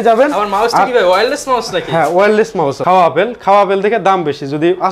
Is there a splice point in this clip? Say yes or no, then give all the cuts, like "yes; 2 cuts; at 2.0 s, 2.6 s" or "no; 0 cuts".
yes; 1 cut; at 2.8 s